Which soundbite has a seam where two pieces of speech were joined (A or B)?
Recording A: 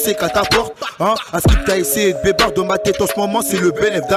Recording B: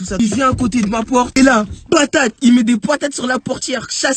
B